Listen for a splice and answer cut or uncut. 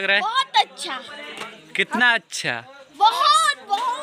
uncut